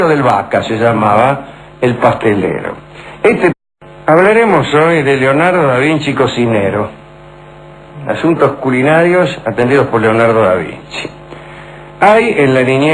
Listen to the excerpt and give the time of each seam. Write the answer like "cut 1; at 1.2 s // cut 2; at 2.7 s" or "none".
none